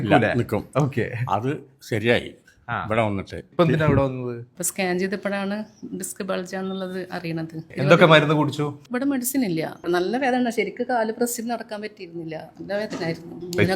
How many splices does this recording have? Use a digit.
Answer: 3